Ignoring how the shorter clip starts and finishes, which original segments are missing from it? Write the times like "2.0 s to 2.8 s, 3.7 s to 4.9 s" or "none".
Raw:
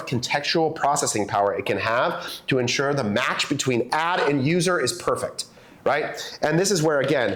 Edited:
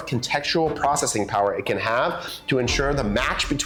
none